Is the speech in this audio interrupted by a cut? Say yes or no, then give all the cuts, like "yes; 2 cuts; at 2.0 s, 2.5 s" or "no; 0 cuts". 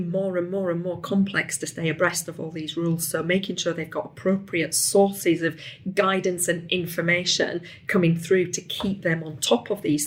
no; 0 cuts